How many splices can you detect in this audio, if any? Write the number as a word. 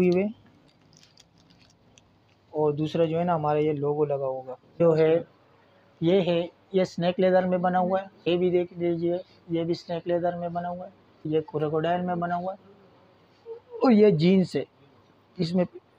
three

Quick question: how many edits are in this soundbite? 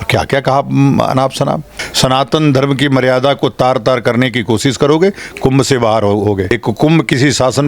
two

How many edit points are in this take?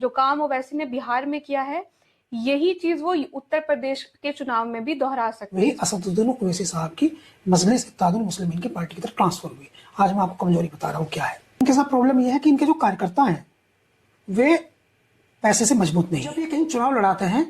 three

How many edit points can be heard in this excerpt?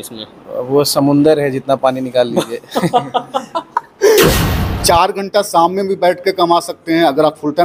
one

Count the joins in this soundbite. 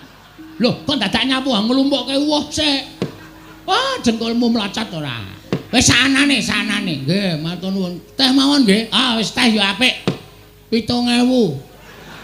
zero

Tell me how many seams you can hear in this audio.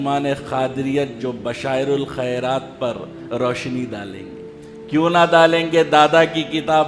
zero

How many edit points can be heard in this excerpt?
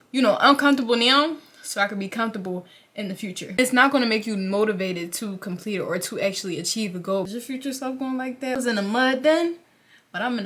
three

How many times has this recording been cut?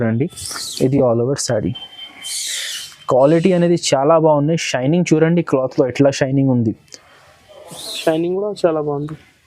zero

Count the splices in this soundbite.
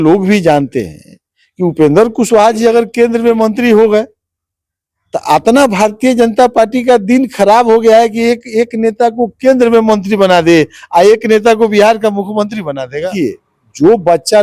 one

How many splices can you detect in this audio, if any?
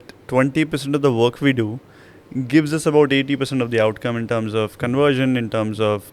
zero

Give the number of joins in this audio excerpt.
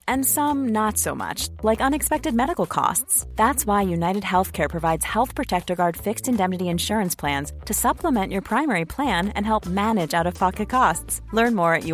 zero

